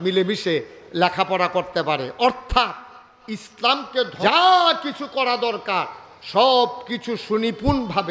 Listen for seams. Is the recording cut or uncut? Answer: cut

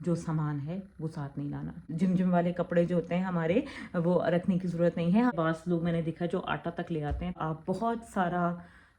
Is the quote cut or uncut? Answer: cut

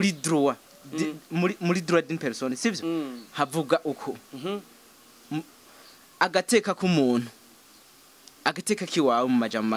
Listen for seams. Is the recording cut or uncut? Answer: uncut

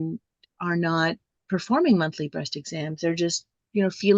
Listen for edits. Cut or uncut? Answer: cut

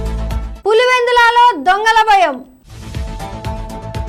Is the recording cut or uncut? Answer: cut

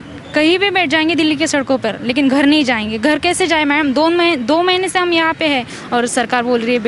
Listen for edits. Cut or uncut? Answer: cut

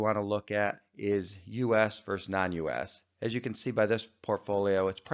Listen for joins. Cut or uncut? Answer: uncut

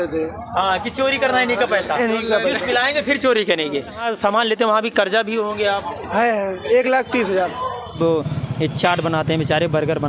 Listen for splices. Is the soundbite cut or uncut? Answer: cut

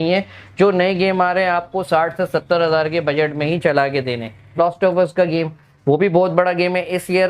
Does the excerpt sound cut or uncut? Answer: cut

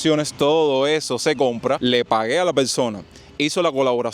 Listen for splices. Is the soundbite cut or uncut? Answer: cut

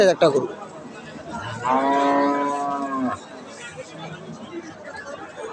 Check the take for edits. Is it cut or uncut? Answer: uncut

